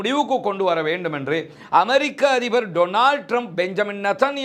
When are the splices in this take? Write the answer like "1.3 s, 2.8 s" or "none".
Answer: none